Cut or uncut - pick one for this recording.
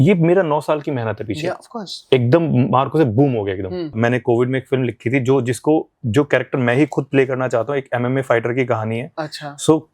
cut